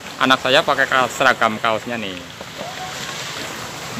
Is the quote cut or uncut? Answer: uncut